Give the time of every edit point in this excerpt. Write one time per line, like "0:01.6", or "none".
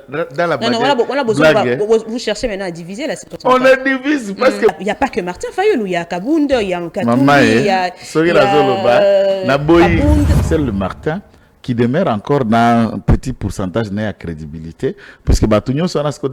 0:04.8
0:10.4